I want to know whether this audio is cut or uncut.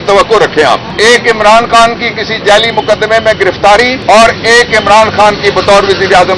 cut